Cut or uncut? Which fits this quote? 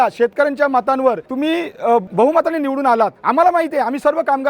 cut